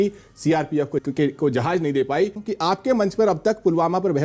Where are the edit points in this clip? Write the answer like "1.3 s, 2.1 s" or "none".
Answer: 1.0 s, 2.4 s